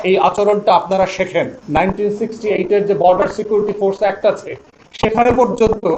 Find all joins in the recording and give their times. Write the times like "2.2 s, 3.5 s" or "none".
1.6 s